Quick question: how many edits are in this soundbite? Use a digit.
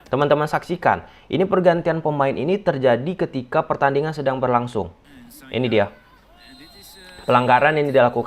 1